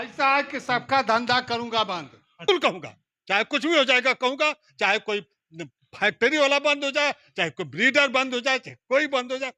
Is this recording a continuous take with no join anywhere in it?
no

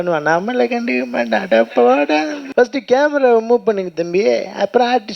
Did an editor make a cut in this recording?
yes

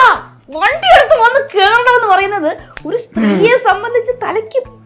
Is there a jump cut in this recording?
no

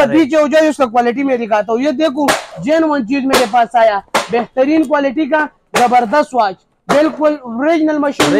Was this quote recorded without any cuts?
yes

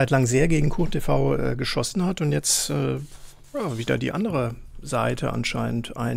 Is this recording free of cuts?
yes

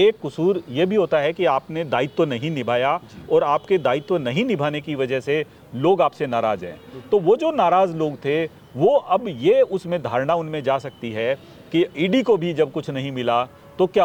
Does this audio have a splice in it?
no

